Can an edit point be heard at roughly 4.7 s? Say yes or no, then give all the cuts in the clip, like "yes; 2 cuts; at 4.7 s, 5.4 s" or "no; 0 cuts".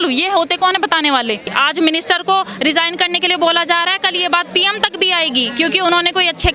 no; 1 cut; at 1.5 s